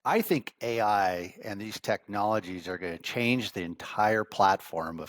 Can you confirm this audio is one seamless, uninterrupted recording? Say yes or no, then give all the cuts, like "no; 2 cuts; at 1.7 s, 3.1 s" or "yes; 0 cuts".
yes; 0 cuts